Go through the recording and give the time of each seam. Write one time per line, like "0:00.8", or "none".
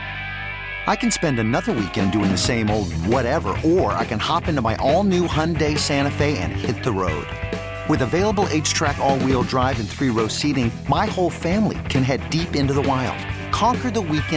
none